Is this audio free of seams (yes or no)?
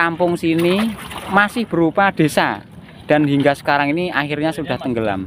yes